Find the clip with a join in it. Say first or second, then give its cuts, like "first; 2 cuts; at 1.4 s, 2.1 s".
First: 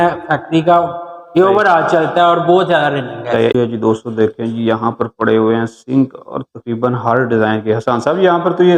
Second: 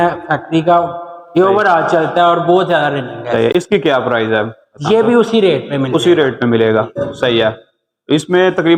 first; 1 cut; at 3.5 s